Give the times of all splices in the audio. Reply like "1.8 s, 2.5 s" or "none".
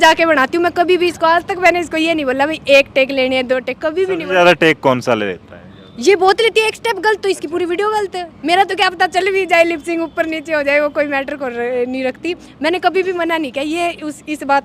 none